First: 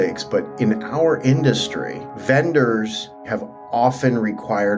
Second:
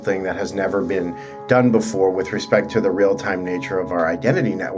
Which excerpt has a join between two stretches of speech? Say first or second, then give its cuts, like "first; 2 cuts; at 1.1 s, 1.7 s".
first; 1 cut; at 3.3 s